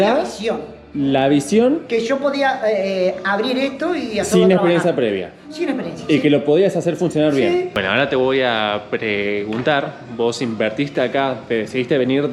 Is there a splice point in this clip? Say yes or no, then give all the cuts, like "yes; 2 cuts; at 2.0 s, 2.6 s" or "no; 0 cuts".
yes; 1 cut; at 7.7 s